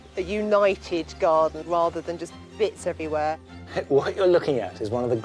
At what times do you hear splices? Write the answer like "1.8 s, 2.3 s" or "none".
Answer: 1.6 s, 3.5 s